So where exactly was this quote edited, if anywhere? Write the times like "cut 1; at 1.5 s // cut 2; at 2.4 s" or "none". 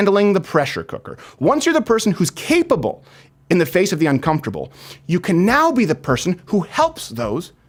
none